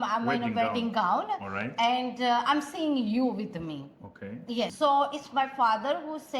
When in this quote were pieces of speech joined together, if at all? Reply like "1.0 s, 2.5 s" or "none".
4.7 s